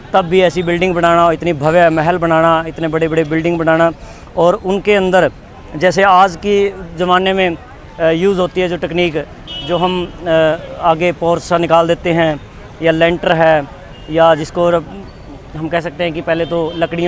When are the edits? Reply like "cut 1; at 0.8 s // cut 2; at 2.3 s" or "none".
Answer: none